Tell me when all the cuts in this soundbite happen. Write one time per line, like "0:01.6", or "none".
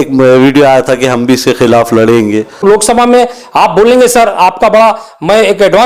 0:02.6